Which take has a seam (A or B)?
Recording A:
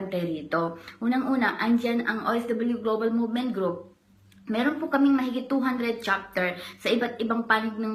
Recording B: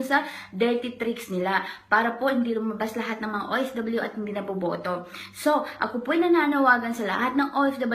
B